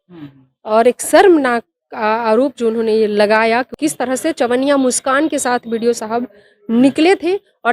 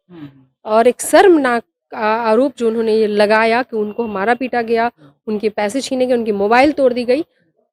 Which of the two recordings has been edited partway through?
first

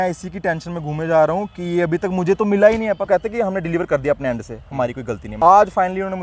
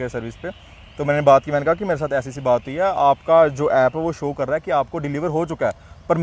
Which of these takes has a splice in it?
first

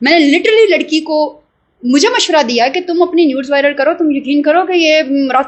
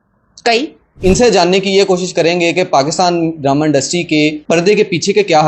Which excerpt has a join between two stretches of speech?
second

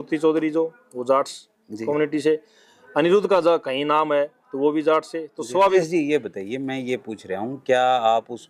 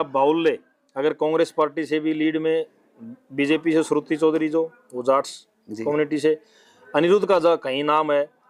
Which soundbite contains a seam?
first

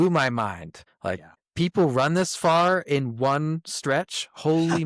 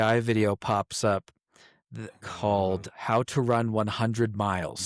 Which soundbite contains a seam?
first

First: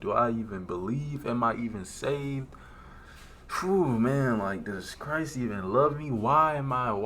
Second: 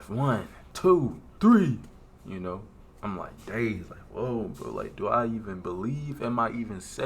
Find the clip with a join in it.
second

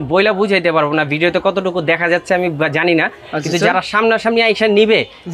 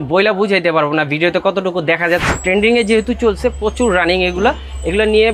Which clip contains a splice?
second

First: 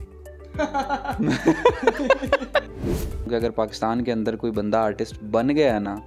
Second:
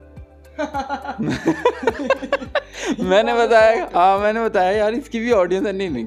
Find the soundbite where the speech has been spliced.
first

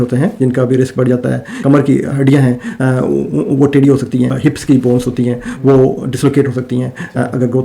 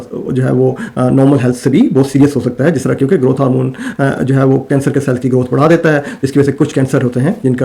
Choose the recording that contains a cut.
first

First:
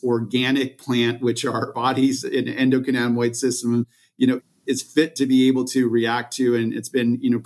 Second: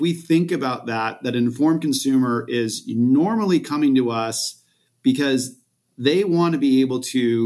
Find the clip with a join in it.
first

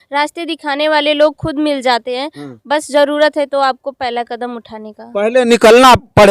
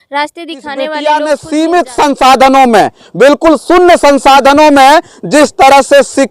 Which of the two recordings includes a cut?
second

